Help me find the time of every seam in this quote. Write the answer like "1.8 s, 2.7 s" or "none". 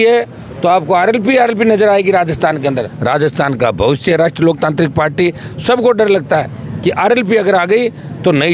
2.9 s